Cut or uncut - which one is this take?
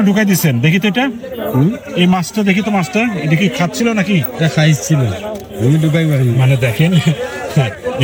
uncut